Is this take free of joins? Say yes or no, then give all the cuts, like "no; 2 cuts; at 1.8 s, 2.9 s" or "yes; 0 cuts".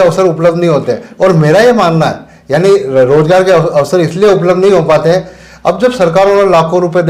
yes; 0 cuts